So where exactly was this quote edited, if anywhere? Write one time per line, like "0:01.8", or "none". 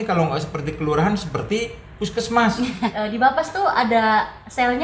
0:02.9

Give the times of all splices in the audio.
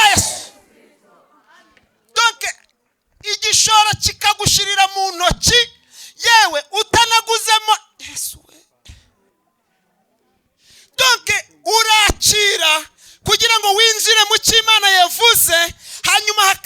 0:09.3

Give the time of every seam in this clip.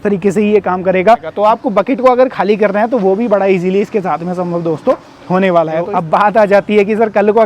0:01.3
0:05.9

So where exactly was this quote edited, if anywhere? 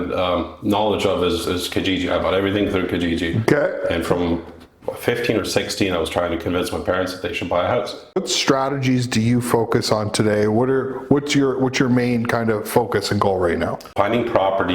0:08.2
0:13.9

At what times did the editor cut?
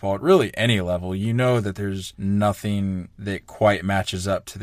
0:02.1
0:03.1

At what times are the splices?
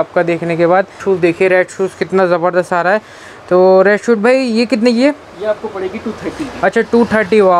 0:01.0

